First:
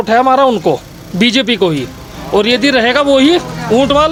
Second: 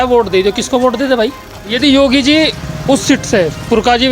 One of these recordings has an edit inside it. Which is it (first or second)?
second